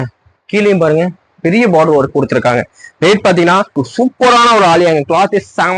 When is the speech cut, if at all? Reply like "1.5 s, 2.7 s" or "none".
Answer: 3.8 s